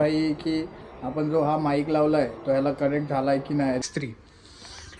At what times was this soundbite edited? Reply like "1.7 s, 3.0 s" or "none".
3.8 s